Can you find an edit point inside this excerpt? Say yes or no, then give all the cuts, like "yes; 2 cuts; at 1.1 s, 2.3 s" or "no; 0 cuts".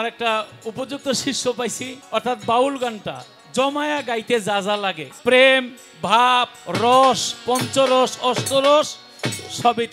yes; 2 cuts; at 1.9 s, 5.1 s